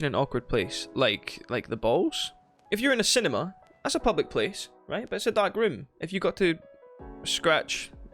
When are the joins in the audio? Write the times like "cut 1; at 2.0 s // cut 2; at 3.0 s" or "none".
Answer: cut 1; at 2.5 s

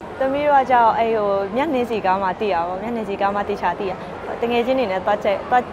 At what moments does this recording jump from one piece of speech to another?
cut 1; at 4.1 s

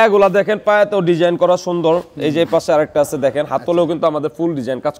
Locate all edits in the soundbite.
none

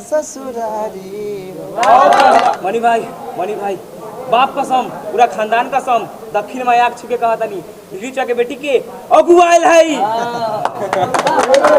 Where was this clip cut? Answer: cut 1; at 2.4 s

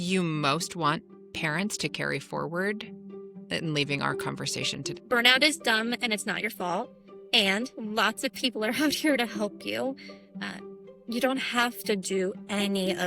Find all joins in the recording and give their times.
cut 1; at 4.9 s

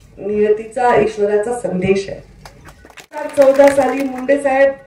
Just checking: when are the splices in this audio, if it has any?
cut 1; at 3.3 s

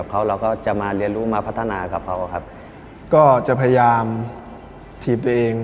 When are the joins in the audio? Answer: cut 1; at 2.8 s

